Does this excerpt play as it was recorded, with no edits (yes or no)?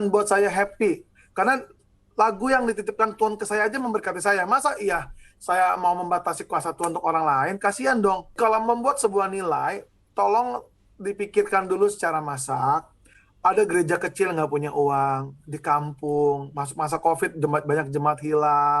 no